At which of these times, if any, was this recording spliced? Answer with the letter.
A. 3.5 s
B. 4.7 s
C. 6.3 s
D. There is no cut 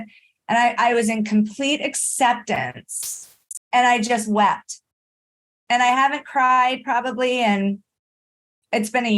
A